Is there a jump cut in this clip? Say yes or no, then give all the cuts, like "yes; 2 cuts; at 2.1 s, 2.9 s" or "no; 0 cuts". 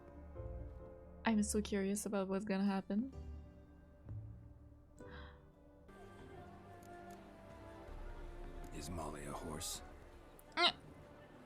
yes; 1 cut; at 5.9 s